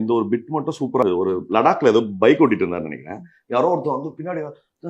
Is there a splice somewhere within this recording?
yes; 1 cut; at 1.0 s

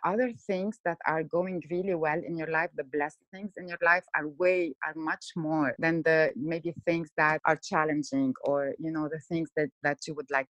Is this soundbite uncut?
no; 2 cuts; at 5.8 s, 7.4 s

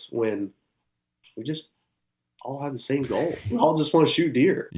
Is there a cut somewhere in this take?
yes; 1 cut; at 3.4 s

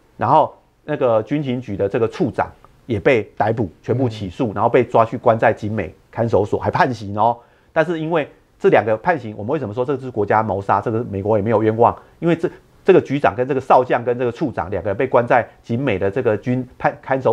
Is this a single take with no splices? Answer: yes; 0 cuts

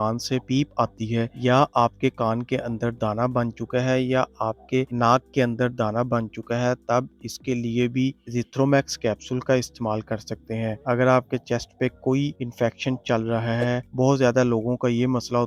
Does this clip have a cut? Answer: no; 0 cuts

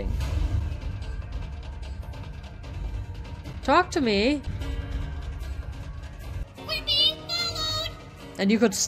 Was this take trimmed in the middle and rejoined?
yes; 3 cuts; at 3.5 s, 4.5 s, 6.4 s

